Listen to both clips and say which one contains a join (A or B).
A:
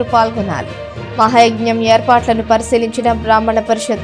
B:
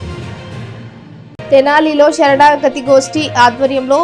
B